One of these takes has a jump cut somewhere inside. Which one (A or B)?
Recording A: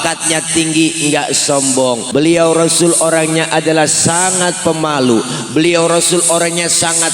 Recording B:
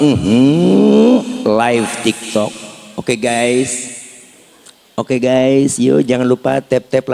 A